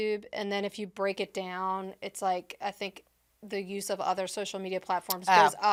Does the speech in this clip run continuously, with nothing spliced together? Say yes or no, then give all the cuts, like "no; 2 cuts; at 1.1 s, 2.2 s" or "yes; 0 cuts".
yes; 0 cuts